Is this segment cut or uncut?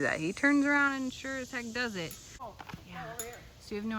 cut